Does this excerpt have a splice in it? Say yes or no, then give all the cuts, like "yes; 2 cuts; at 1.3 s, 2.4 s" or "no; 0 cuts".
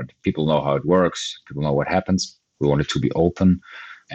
yes; 1 cut; at 2.4 s